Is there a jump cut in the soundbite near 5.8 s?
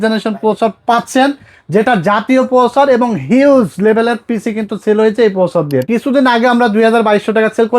yes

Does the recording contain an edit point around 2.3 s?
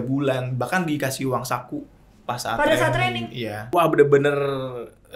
no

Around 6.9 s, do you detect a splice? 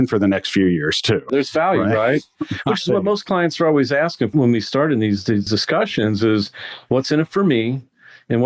no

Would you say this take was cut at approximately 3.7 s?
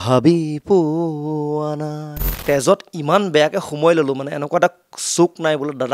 no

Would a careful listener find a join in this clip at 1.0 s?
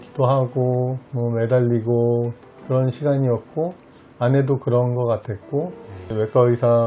yes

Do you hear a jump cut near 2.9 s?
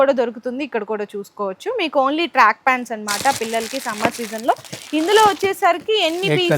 no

